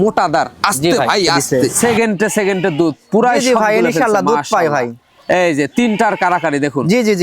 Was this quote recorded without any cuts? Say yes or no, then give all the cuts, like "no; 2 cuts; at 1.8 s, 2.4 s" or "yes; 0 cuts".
no; 1 cut; at 1.4 s